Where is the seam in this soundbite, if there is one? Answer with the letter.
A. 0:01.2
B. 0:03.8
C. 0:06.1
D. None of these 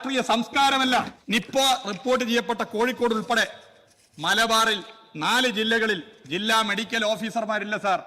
A